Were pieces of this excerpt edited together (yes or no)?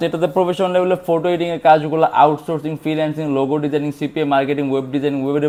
no